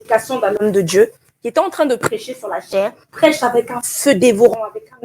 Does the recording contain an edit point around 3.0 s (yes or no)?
yes